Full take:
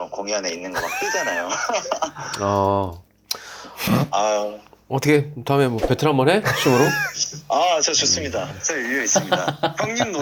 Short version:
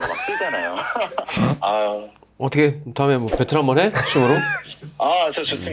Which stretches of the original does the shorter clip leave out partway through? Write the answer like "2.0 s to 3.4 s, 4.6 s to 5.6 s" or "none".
2.0 s to 3.8 s

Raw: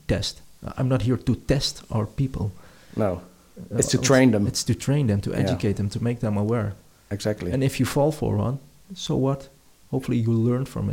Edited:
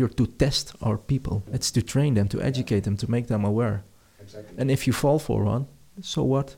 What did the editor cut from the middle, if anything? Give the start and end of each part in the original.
2.7 s to 4.6 s

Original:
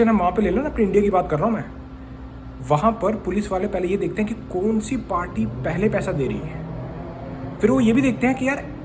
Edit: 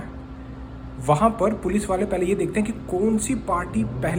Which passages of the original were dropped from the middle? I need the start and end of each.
none

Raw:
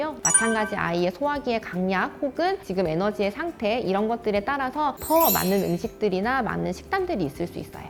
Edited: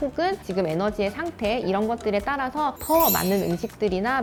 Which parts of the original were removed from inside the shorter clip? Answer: none

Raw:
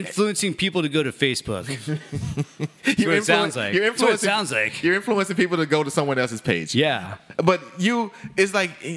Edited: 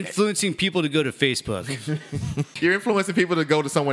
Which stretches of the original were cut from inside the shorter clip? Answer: 2.5 s to 4.7 s

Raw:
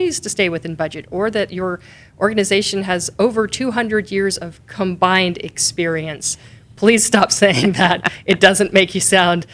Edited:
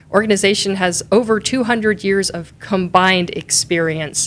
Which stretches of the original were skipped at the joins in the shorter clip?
none

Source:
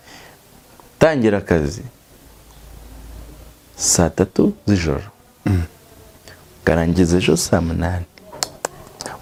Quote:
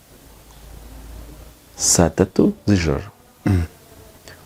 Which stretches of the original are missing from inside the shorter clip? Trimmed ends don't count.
none

